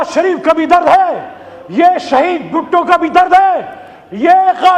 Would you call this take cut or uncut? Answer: uncut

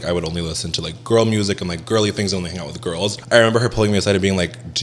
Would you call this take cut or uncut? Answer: cut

